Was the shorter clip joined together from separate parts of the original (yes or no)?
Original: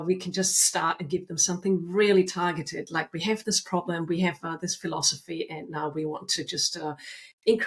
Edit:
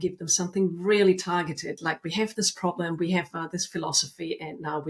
no